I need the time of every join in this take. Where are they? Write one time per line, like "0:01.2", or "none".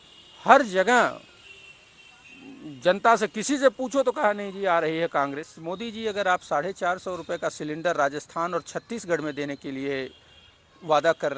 0:05.5